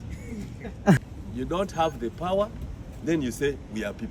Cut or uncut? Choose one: cut